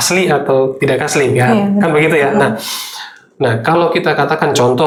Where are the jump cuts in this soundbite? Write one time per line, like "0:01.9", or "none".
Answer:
none